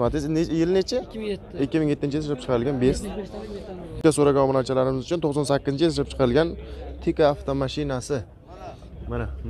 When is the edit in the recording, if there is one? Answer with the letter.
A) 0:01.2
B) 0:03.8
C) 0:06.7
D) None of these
B